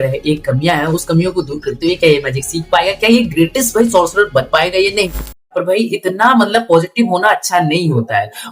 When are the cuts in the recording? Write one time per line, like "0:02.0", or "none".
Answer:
0:05.5